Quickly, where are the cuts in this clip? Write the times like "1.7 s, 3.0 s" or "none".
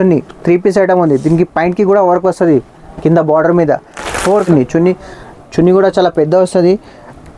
4.5 s